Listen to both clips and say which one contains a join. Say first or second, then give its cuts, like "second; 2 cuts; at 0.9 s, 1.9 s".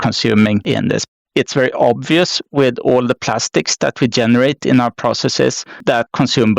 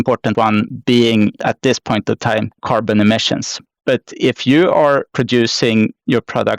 first; 1 cut; at 1.1 s